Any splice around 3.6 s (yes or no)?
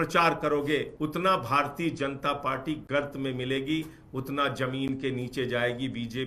no